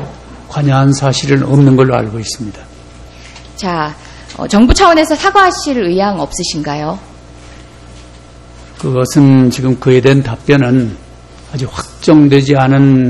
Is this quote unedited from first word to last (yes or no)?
yes